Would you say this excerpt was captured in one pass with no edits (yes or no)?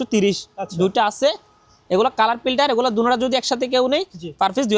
yes